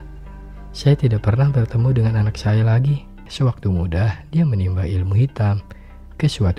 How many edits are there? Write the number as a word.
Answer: one